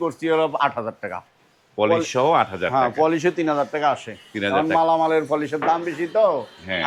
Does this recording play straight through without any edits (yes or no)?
yes